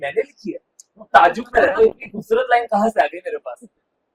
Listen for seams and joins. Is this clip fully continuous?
yes; 0 cuts

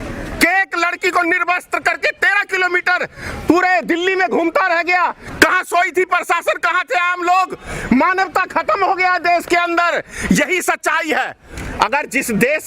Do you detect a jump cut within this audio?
yes; 1 cut; at 11.6 s

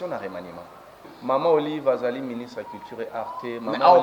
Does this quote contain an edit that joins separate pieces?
yes; 1 cut; at 1.1 s

